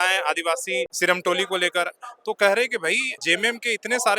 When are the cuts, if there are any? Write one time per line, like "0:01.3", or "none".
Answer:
0:00.9
0:03.1